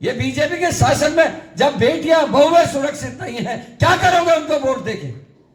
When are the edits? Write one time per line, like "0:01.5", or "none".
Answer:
none